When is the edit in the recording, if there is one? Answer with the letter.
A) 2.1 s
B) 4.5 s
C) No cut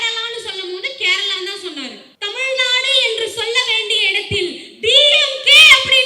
A